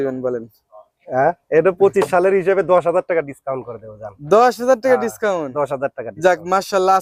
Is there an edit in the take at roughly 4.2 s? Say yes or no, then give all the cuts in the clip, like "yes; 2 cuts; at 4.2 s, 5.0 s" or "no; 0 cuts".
no; 0 cuts